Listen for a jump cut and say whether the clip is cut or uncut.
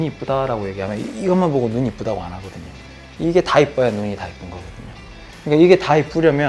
uncut